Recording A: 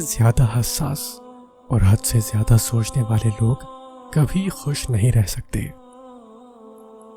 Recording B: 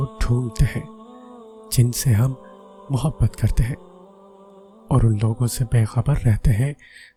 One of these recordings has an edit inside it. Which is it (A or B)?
A